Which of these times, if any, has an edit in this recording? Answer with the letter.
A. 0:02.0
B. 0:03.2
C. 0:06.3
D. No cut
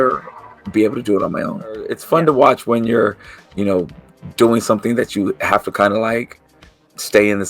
A